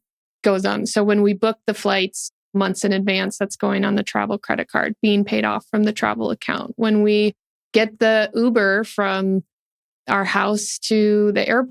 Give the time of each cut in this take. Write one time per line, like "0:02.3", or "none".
none